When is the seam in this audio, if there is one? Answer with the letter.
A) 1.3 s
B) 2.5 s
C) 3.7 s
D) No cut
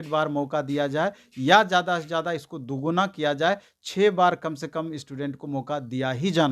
D